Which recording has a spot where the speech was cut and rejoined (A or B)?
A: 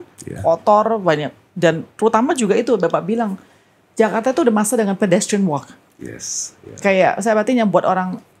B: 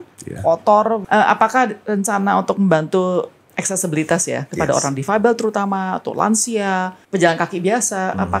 B